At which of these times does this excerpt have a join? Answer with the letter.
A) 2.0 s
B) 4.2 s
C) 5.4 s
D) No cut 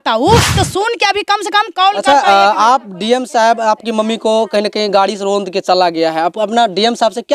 A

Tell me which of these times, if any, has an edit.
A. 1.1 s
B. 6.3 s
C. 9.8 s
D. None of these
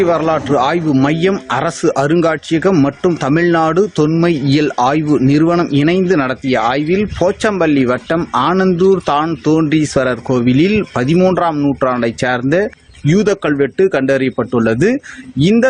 A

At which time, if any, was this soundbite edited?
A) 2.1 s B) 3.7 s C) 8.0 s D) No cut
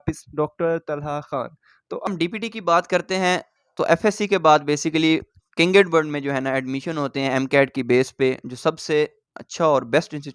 A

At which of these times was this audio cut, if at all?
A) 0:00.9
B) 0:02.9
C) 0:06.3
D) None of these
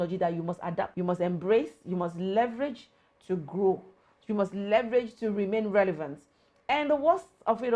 A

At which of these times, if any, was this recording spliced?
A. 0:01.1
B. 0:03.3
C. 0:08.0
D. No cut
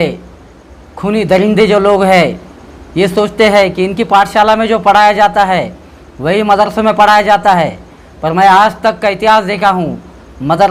D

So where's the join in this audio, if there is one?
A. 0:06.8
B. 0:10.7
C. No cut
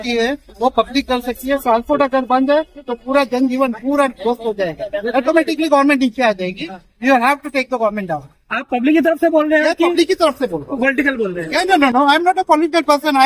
C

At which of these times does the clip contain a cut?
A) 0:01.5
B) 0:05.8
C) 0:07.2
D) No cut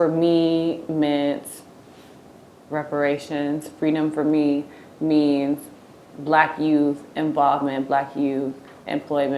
D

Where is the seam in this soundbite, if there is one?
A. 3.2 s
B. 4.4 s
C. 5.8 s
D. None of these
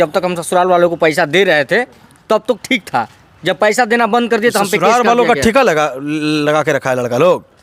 D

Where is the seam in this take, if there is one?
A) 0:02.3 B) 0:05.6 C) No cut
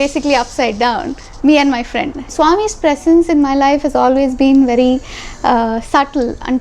A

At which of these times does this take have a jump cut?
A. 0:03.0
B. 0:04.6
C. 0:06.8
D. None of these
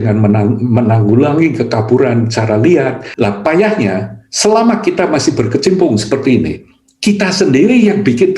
A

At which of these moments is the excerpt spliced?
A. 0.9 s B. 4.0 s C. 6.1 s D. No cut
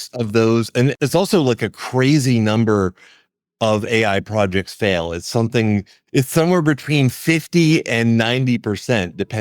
A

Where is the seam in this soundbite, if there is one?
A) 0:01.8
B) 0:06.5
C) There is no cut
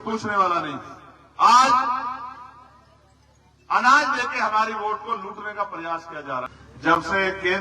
B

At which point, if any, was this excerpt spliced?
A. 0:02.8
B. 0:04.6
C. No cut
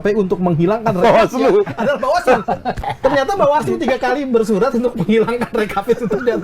A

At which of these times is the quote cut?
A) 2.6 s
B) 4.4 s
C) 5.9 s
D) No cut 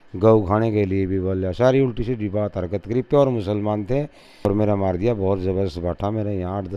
B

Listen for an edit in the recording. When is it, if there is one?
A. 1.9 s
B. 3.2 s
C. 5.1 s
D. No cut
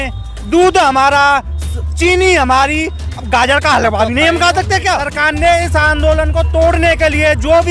C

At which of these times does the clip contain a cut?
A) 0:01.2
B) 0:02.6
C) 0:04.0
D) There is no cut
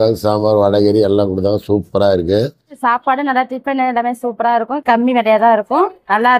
B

